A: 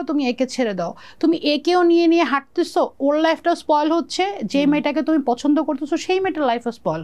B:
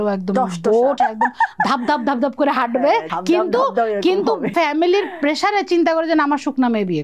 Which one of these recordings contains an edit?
B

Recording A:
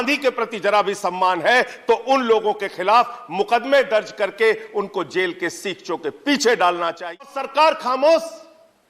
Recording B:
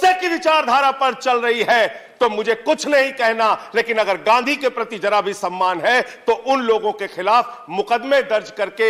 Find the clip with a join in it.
A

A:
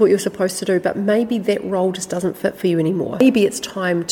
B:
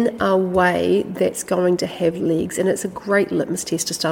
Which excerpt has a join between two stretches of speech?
A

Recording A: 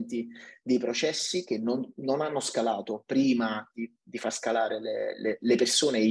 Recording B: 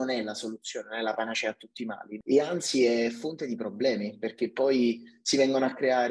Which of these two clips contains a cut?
B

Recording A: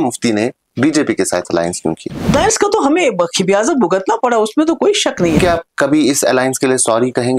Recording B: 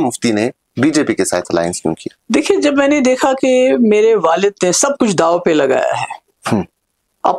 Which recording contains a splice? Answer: A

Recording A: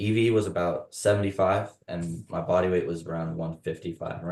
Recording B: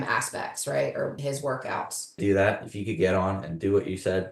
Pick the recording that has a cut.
B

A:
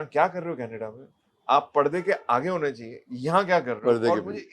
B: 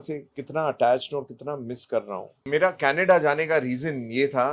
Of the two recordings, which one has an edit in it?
B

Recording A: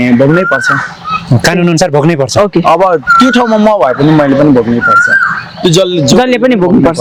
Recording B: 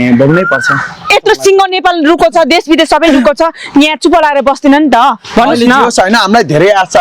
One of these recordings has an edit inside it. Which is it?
B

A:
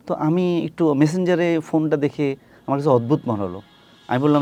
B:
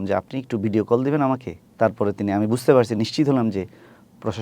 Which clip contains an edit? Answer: B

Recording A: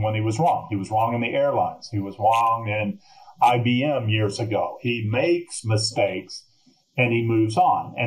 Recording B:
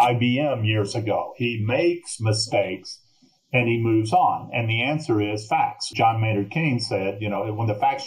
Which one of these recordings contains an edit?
B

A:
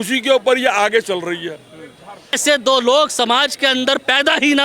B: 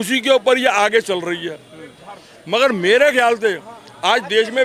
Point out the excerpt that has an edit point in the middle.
A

